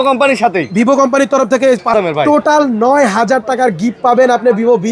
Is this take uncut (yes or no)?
no